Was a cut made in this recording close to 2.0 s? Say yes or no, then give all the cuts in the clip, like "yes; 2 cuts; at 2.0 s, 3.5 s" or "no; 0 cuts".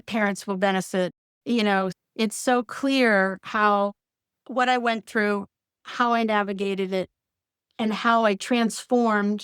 yes; 2 cuts; at 1.2 s, 2.0 s